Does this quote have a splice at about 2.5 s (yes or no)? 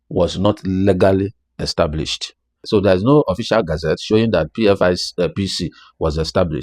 yes